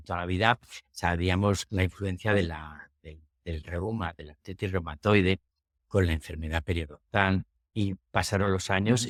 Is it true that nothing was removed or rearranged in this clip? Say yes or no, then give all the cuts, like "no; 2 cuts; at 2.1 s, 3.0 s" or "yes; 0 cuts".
yes; 0 cuts